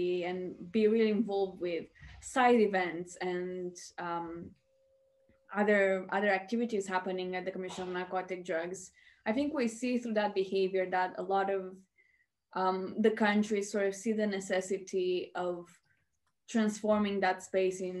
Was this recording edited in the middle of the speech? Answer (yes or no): no